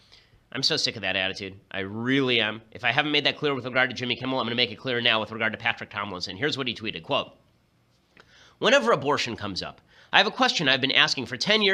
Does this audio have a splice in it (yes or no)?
no